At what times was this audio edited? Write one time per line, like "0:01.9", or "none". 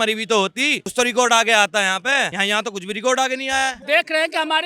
0:00.9
0:02.3
0:03.8